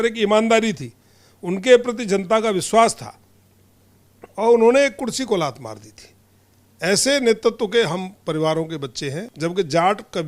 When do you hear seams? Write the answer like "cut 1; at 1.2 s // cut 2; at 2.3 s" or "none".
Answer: cut 1; at 9.2 s